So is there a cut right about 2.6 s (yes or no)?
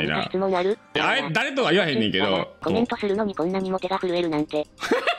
yes